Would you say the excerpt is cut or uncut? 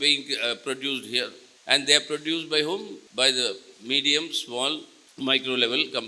cut